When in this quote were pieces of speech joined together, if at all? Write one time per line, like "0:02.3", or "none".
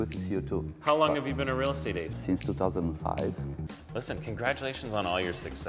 0:03.6